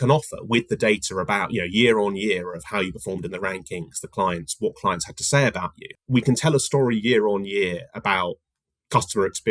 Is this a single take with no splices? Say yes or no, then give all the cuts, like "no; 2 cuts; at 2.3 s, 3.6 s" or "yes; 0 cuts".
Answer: no; 1 cut; at 5.9 s